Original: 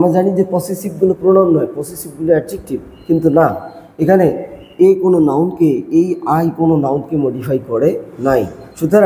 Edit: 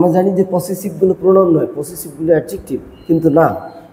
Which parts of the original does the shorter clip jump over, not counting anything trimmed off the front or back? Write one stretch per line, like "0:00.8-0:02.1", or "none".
none